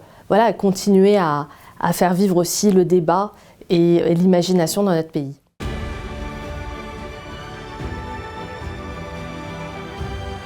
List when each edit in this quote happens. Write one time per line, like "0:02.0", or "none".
0:05.5